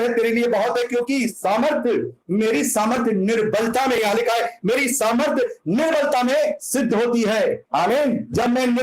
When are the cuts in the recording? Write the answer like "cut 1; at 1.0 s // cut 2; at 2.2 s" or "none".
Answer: cut 1; at 7.6 s

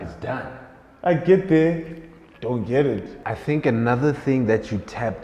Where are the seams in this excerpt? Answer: cut 1; at 3.2 s

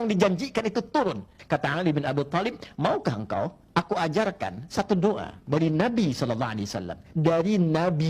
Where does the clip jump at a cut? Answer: cut 1; at 1.4 s

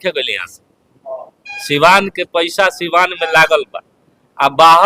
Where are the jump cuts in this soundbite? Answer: none

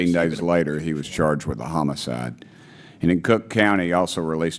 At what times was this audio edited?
none

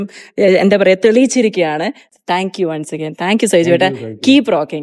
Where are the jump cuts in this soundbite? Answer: none

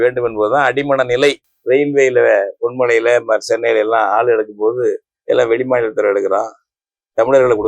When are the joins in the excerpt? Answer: cut 1; at 1.5 s

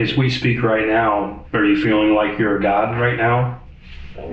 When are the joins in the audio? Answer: cut 1; at 1.4 s

